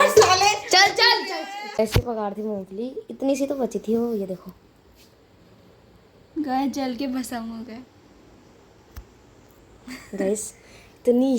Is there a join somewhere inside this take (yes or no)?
yes